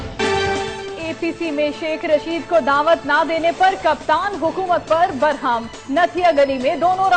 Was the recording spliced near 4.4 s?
yes; 1 cut; at 4.4 s

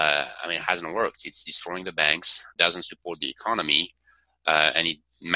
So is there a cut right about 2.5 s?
yes; 1 cut; at 2.5 s

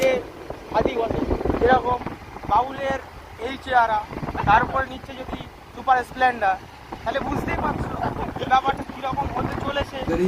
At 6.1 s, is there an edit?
no; 0 cuts

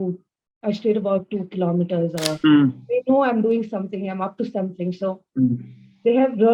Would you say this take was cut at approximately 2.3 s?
yes; 1 cut; at 2.3 s

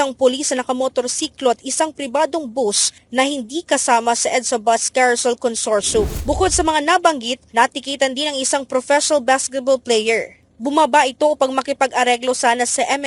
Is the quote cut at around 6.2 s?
yes; 1 cut; at 6.2 s

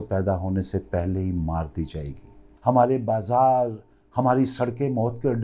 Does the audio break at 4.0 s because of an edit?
no; 1 cut; at 2.5 s

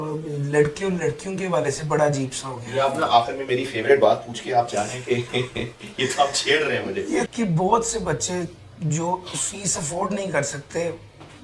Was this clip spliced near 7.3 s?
yes; 1 cut; at 7.3 s

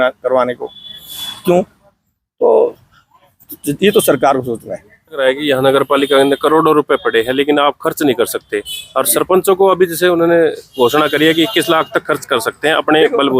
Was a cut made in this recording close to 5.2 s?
yes; 1 cut; at 5.2 s

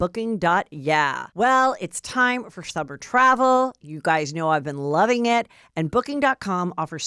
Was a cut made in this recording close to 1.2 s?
yes; 1 cut; at 1.2 s

